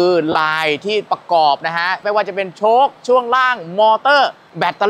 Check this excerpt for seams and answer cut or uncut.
cut